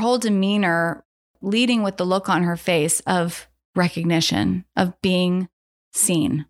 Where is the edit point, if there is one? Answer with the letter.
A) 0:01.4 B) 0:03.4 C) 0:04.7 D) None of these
A